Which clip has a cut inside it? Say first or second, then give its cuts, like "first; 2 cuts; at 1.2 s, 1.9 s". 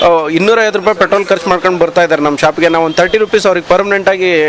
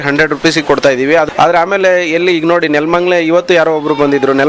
second; 1 cut; at 1.3 s